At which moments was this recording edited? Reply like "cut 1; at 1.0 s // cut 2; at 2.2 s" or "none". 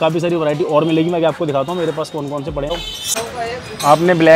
cut 1; at 2.7 s